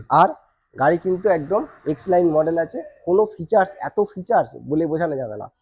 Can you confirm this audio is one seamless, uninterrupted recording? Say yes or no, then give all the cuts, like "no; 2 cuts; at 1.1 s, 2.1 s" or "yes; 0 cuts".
yes; 0 cuts